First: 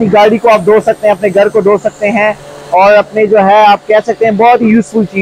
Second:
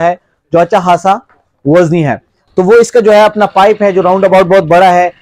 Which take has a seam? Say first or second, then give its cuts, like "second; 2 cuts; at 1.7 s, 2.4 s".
second; 1 cut; at 2.3 s